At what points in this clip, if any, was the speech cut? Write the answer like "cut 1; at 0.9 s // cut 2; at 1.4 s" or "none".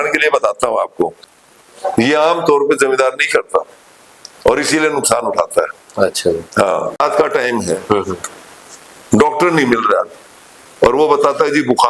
cut 1; at 1.3 s // cut 2; at 7.0 s